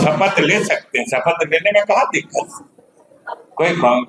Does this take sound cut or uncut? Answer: uncut